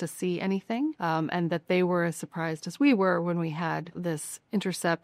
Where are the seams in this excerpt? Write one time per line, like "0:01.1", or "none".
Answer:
0:01.0
0:03.9